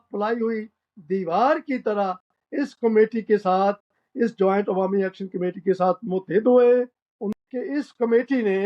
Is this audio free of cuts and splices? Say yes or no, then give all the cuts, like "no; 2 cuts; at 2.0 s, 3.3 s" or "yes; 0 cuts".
no; 1 cut; at 7.2 s